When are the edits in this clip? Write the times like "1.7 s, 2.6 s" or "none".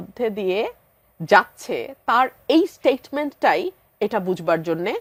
none

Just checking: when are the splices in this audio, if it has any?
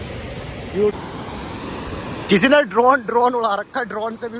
1.0 s

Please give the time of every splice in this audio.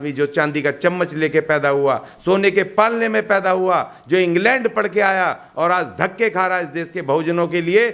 none

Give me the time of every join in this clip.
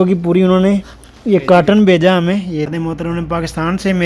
2.7 s

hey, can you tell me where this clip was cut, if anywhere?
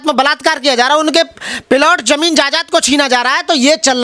none

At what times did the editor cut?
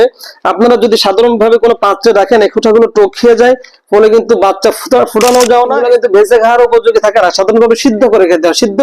5.8 s

